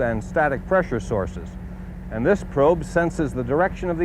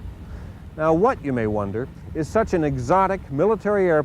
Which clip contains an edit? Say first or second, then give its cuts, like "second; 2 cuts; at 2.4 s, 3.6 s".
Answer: second; 1 cut; at 2.0 s